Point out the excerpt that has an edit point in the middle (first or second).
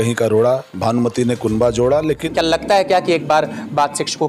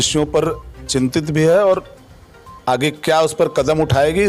first